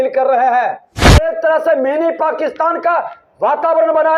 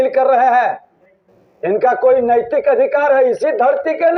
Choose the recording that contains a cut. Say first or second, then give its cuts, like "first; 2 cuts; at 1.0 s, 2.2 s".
first; 1 cut; at 1.3 s